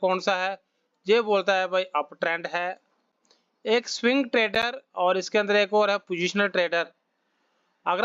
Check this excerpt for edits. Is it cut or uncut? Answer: uncut